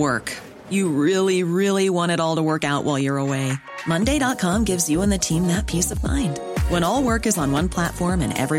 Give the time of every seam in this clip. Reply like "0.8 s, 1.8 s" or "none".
none